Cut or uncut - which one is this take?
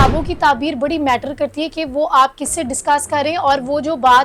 uncut